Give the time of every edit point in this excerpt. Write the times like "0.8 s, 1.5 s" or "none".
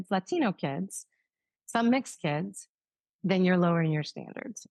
none